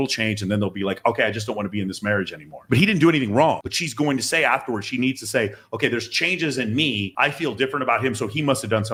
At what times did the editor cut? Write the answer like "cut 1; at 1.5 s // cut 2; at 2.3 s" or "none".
none